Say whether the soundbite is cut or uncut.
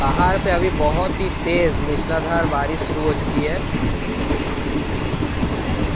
uncut